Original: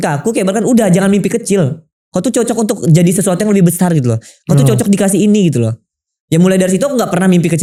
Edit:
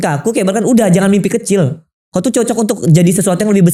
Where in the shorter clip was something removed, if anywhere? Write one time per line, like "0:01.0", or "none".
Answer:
none